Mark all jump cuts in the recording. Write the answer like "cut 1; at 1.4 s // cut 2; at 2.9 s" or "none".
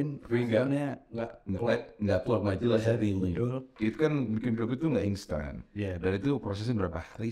cut 1; at 3.6 s